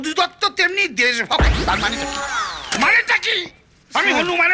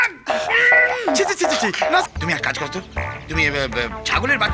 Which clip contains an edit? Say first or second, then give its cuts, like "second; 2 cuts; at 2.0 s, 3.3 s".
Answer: second; 1 cut; at 2.0 s